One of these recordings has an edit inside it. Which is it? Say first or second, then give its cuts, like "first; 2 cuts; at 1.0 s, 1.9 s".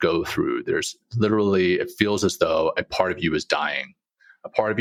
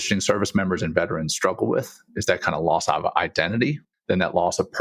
second; 1 cut; at 3.9 s